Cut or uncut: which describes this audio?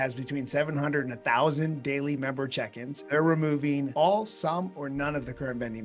cut